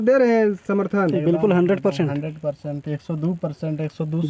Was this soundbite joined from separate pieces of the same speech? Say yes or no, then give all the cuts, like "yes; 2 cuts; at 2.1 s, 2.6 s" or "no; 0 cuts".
no; 0 cuts